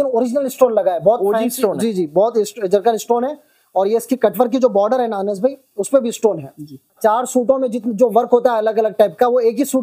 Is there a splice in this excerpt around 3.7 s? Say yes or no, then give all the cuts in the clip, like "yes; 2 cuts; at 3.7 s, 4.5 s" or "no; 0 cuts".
no; 1 cut; at 6.9 s